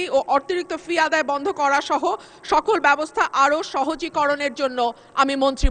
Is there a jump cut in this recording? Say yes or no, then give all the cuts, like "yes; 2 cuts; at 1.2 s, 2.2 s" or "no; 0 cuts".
no; 0 cuts